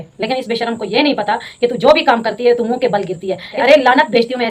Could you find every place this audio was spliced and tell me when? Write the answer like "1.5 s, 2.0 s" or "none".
3.5 s